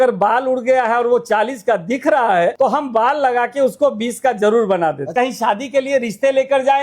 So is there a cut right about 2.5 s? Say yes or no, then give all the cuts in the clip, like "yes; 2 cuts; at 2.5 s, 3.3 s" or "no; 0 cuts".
yes; 2 cuts; at 2.5 s, 5.0 s